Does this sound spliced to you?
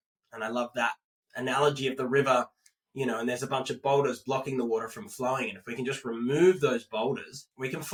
no; 0 cuts

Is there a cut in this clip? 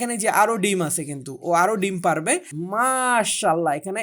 yes; 1 cut; at 2.6 s

